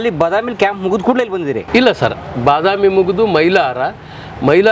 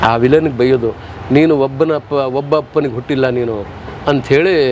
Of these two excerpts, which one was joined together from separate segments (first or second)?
first